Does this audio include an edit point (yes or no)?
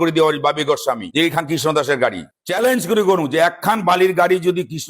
yes